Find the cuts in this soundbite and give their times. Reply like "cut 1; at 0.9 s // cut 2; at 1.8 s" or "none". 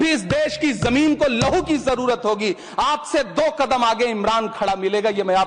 none

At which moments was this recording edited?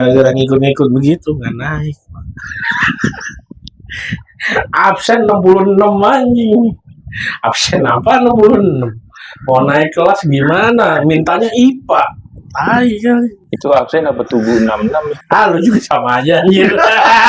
none

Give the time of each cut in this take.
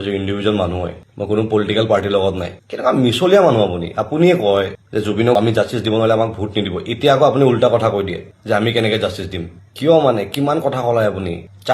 cut 1; at 2.6 s

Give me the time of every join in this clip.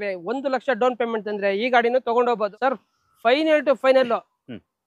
cut 1; at 2.4 s

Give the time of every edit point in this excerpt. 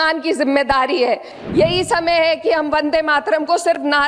cut 1; at 1.4 s

